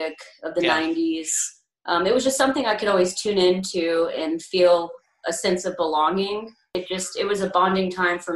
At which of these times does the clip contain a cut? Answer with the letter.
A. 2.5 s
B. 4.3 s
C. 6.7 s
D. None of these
C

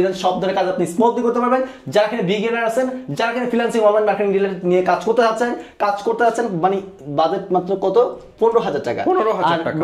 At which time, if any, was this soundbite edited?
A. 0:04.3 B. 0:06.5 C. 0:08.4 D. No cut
D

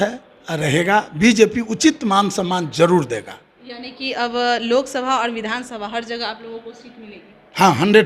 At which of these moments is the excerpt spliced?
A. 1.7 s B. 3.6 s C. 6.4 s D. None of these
D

